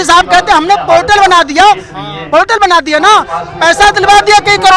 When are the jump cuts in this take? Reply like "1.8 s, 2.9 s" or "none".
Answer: none